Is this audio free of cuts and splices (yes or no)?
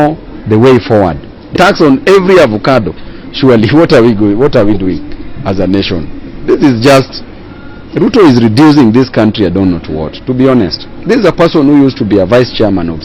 no